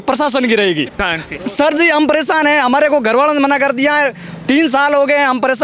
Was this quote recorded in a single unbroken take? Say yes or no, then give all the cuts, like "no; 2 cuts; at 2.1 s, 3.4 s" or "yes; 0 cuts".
no; 1 cut; at 0.9 s